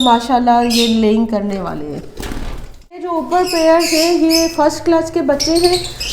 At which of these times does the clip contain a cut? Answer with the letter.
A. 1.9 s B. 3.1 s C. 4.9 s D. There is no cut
B